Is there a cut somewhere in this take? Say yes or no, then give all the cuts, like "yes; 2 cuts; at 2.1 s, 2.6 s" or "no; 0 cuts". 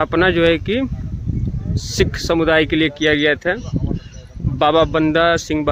no; 0 cuts